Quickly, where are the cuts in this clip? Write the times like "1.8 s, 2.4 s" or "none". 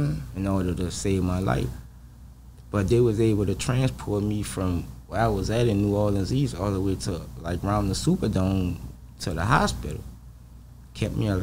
none